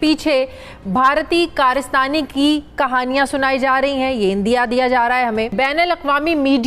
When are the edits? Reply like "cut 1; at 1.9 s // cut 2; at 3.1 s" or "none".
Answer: cut 1; at 5.5 s